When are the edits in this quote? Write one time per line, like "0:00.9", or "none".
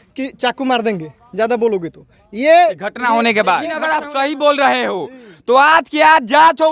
0:03.9